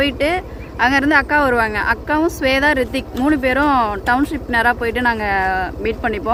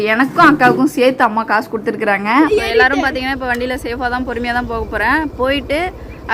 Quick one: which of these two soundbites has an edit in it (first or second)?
second